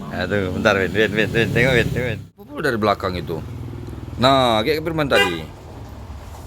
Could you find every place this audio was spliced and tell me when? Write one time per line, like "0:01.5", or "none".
0:02.2